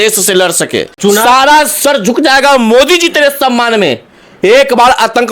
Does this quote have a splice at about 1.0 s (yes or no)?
yes